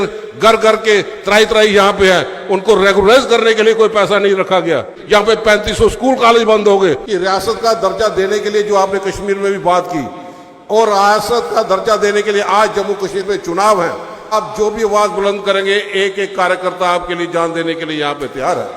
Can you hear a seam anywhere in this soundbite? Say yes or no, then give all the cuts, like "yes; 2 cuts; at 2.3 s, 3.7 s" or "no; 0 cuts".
yes; 3 cuts; at 4.9 s, 7.0 s, 14.3 s